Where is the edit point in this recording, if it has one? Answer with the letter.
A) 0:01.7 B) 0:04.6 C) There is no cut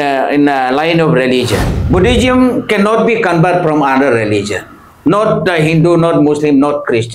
A